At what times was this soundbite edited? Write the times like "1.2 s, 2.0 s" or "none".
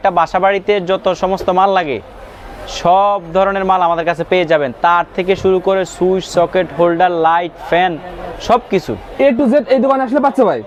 none